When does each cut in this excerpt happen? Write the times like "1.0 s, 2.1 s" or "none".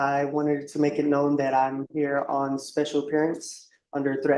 none